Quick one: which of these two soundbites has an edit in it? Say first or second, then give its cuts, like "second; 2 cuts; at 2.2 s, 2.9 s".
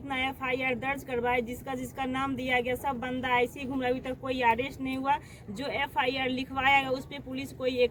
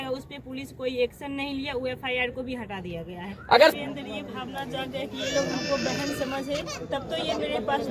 second; 1 cut; at 3.7 s